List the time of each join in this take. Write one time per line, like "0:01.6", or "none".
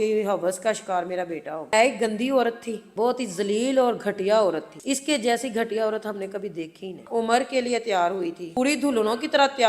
0:01.7
0:02.9
0:07.0
0:08.4

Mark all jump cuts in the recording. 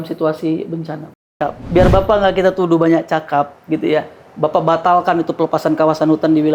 0:01.2

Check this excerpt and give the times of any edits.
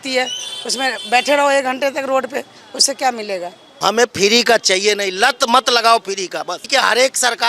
0:03.7
0:06.6

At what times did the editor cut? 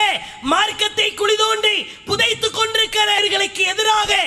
0:03.2

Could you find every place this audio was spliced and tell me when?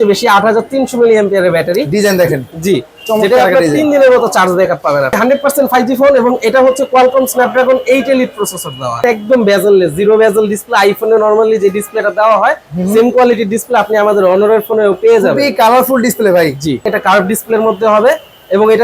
0:05.2
0:09.0
0:16.9

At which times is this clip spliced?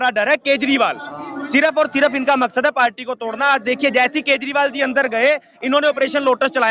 none

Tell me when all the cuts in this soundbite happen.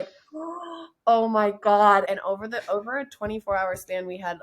0:02.1

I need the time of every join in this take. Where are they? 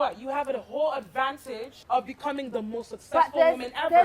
0:01.7

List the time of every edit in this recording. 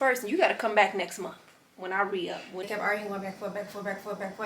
0:02.7

